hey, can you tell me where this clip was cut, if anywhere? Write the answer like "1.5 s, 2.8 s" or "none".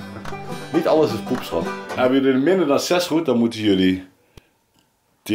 1.8 s

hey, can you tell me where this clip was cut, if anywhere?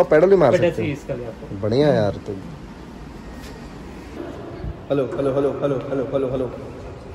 none

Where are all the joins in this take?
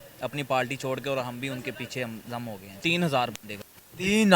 2.8 s

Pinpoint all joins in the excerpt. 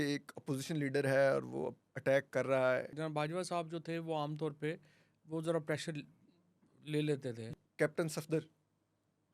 2.9 s, 7.5 s

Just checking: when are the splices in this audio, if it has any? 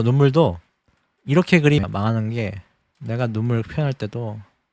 1.8 s

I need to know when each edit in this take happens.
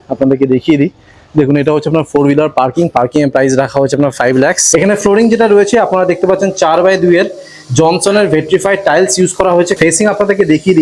4.6 s, 9.7 s

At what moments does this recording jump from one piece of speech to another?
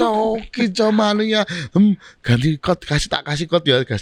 none

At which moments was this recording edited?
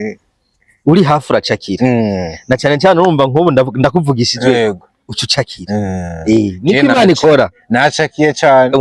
none

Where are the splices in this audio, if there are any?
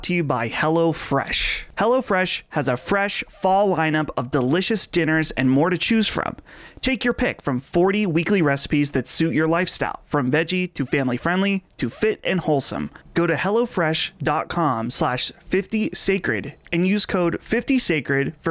1.6 s, 13.0 s

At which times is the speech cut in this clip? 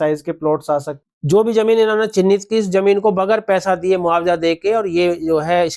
1.0 s

